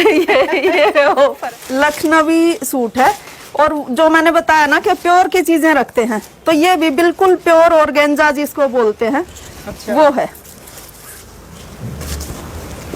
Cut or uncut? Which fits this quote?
cut